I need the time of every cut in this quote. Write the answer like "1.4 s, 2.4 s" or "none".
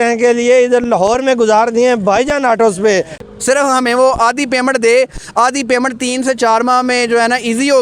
3.2 s

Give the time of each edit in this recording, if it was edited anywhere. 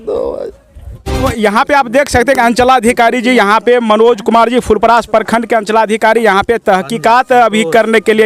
1.2 s

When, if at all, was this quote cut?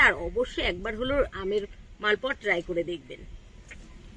none

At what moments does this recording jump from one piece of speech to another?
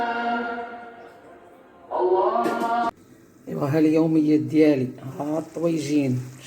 2.9 s

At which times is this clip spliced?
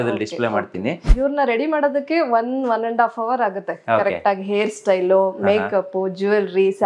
1.1 s

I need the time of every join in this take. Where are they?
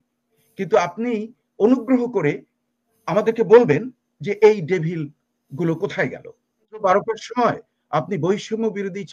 6.8 s

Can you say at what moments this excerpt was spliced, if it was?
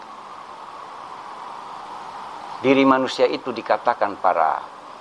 1.8 s

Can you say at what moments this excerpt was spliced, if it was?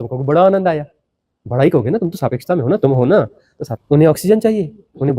3.8 s

